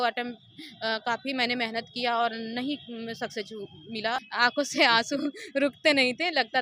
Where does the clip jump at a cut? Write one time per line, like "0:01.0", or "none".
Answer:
0:04.2